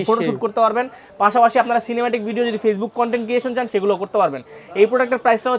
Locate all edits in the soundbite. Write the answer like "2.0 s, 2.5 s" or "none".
none